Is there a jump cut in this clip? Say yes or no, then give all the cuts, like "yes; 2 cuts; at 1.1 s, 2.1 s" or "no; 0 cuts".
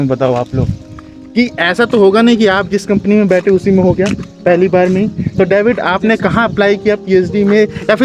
no; 0 cuts